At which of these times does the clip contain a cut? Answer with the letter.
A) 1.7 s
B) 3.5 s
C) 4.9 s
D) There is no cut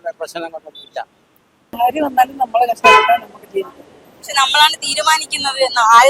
A